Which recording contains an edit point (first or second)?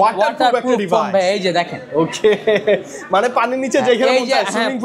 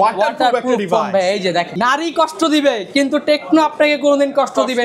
second